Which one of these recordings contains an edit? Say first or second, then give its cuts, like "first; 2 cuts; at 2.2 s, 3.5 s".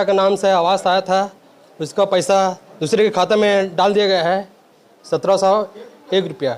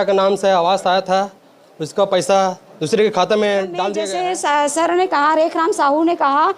second; 1 cut; at 4.0 s